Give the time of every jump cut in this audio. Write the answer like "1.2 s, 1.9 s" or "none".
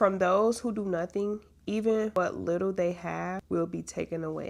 2.2 s, 3.4 s